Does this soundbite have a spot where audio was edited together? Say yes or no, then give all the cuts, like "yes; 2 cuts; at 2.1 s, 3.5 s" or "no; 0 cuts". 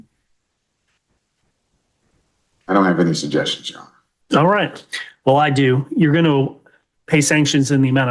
yes; 1 cut; at 1.6 s